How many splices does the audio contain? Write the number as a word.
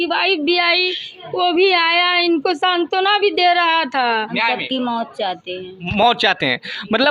one